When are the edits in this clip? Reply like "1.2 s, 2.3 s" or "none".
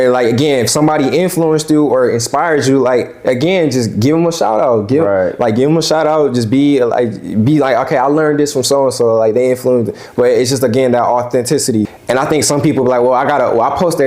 11.9 s